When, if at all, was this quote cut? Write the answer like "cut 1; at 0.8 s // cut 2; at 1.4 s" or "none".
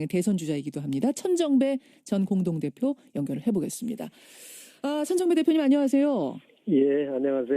cut 1; at 3.0 s